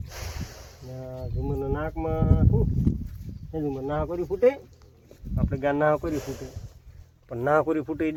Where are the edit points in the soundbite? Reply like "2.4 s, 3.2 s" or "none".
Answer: none